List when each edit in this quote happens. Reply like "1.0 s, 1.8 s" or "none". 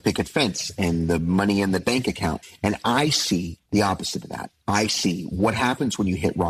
3.6 s